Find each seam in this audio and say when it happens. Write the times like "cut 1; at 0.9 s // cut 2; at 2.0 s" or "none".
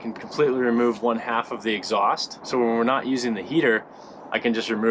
cut 1; at 2.3 s